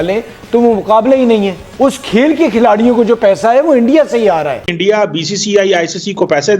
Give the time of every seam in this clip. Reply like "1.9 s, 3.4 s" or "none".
1.6 s, 4.7 s